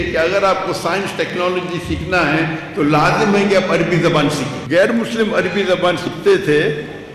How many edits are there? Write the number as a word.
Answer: one